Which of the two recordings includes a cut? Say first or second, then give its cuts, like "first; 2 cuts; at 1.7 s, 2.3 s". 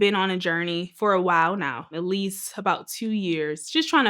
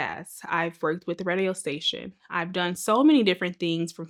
first; 2 cuts; at 0.9 s, 1.9 s